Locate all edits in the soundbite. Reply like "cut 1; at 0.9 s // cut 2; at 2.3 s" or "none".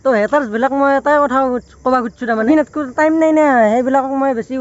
cut 1; at 2.4 s